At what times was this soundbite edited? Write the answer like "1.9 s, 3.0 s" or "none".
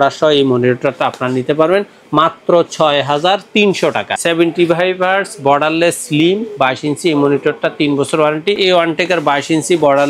4.1 s, 8.6 s